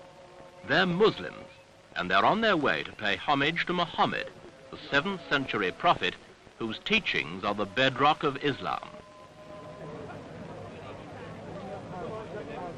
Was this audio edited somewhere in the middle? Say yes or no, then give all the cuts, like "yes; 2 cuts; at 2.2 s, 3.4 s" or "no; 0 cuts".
no; 0 cuts